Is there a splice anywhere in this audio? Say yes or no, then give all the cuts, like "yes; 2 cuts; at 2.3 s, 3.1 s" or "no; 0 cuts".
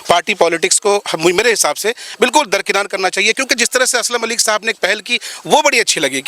no; 0 cuts